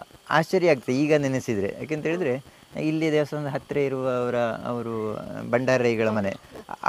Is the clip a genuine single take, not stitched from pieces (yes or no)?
yes